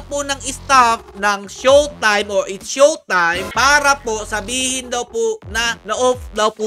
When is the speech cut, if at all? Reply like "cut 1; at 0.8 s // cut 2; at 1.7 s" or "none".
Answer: none

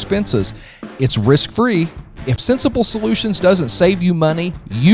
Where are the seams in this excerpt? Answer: cut 1; at 2.3 s

